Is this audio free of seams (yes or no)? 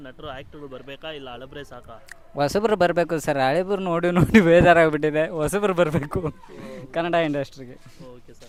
yes